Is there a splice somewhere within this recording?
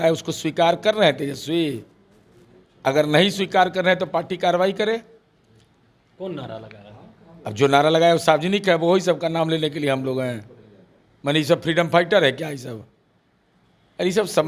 no; 0 cuts

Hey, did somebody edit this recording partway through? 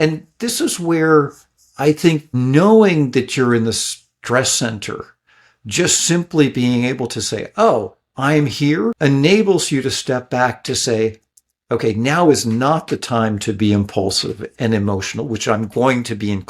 yes; 2 cuts; at 2.3 s, 9.0 s

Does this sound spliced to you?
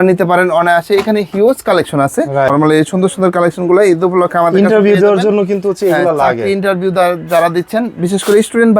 yes; 1 cut; at 2.5 s

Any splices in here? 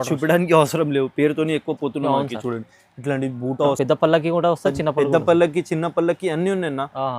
yes; 1 cut; at 3.8 s

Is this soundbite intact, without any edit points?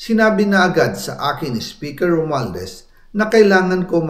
yes; 0 cuts

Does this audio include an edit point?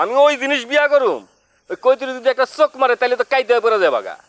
no; 0 cuts

